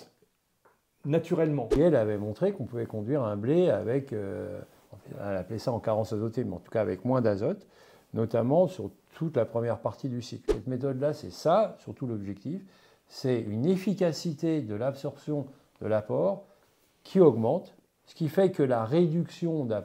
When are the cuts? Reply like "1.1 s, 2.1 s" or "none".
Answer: 1.7 s, 10.5 s